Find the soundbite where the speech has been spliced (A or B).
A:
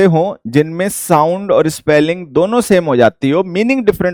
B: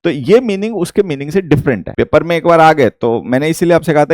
B